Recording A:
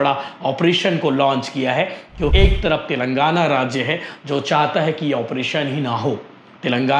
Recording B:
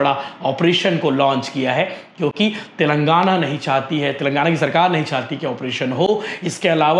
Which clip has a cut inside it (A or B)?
A